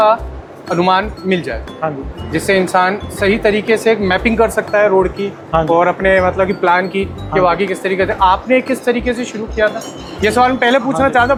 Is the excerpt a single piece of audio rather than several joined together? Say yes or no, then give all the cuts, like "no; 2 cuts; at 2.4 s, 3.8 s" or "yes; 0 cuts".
yes; 0 cuts